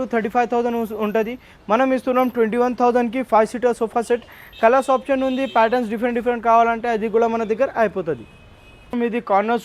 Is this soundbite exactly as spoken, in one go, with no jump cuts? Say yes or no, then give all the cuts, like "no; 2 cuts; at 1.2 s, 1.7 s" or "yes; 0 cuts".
yes; 0 cuts